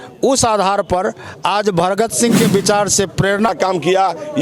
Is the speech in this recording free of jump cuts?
no; 1 cut; at 3.5 s

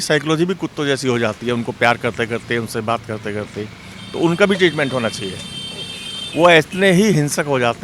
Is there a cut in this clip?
no; 0 cuts

